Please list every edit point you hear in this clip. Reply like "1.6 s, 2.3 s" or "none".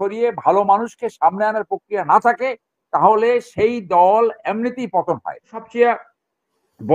5.6 s